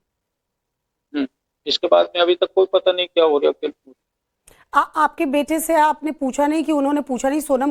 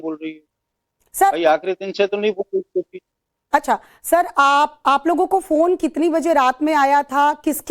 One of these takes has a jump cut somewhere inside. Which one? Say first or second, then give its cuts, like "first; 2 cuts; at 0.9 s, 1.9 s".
second; 1 cut; at 1.3 s